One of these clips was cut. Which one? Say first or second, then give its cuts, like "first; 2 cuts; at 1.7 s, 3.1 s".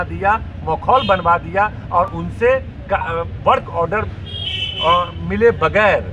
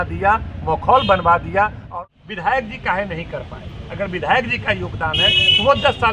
second; 1 cut; at 1.8 s